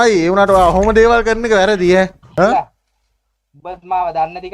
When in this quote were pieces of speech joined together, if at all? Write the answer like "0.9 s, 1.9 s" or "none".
2.2 s